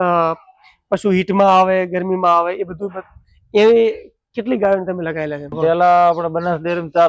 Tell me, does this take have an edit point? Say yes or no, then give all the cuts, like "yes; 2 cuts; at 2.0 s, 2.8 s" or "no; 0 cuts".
yes; 1 cut; at 5.5 s